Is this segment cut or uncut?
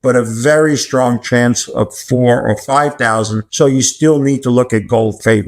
cut